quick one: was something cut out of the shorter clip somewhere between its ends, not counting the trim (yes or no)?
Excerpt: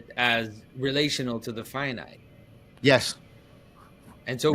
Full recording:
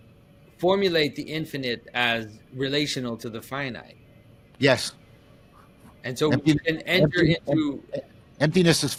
no